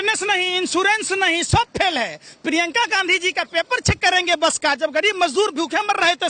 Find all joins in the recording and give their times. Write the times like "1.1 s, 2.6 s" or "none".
none

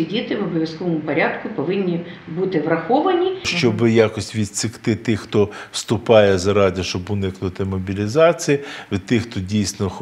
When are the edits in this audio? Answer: 3.5 s

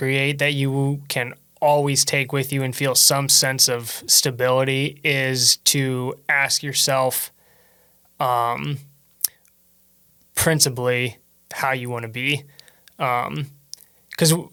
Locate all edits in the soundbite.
none

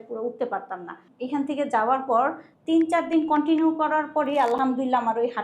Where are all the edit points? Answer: 1.1 s, 2.5 s

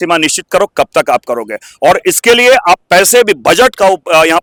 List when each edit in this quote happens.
none

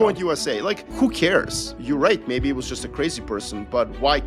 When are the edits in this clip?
0.9 s, 1.7 s

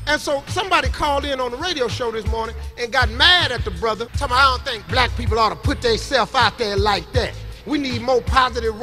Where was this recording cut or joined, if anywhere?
4.1 s

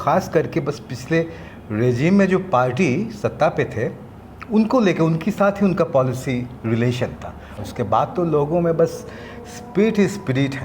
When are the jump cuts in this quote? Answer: 7.6 s

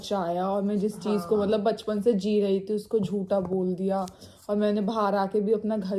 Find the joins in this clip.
none

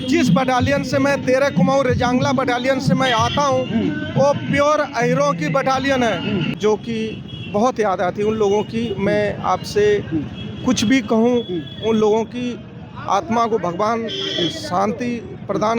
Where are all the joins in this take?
6.5 s

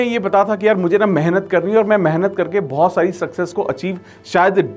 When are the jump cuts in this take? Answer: none

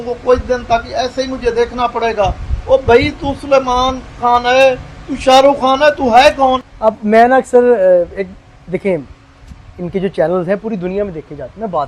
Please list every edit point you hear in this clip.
none

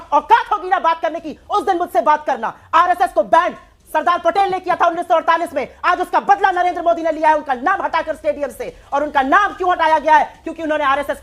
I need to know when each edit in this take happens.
none

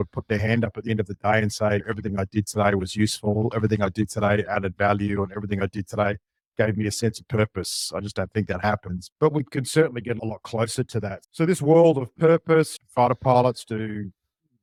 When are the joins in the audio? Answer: none

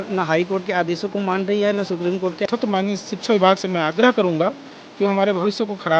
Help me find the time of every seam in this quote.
2.5 s

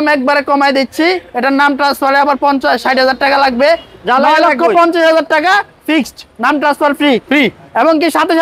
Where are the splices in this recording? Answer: none

